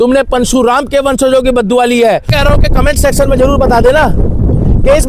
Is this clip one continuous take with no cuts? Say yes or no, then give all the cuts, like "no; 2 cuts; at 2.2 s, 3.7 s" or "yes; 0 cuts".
no; 1 cut; at 2.3 s